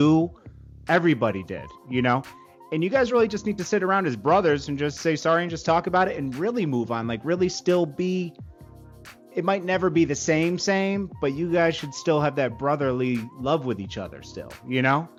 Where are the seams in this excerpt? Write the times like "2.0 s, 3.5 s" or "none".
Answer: none

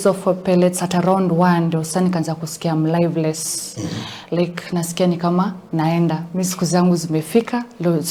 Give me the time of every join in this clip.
none

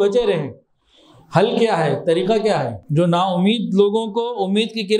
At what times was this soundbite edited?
2.8 s

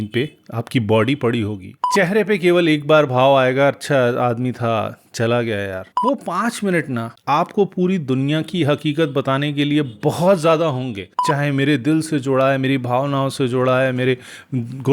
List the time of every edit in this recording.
1.8 s, 5.9 s, 11.1 s

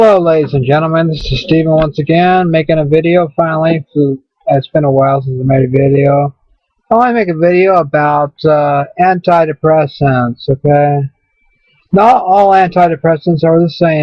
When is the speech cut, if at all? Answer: none

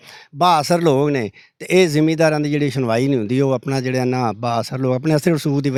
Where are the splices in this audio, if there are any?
none

